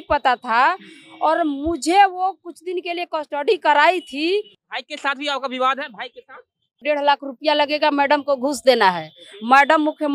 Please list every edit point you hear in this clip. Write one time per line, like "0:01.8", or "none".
0:04.6
0:06.8